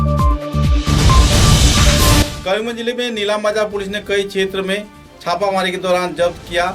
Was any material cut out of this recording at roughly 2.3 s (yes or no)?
yes